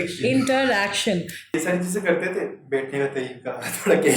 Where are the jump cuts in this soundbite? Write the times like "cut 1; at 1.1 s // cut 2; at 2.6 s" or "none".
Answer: cut 1; at 1.4 s